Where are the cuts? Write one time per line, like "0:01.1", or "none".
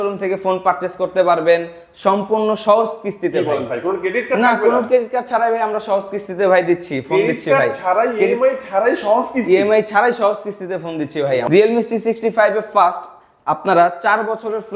0:11.5